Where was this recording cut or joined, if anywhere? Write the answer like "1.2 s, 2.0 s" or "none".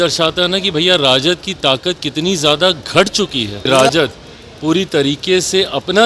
3.7 s